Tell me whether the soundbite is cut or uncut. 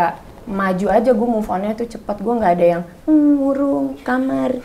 uncut